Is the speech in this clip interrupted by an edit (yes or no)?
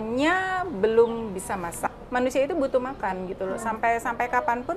yes